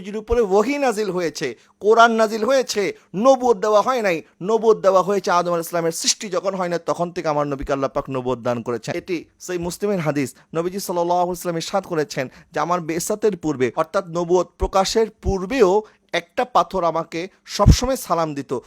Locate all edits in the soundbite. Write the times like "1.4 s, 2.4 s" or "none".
8.9 s